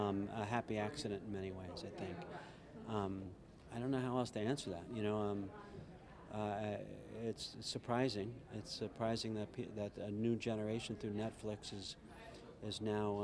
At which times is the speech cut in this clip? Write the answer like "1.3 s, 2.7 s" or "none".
none